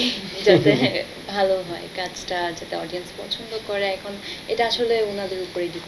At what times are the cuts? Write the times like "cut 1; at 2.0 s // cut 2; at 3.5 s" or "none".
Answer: none